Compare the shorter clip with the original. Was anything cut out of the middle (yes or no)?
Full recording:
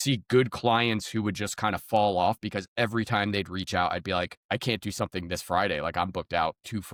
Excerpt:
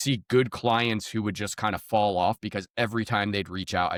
no